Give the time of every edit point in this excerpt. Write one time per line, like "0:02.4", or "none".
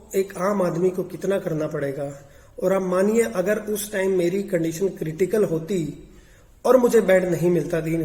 none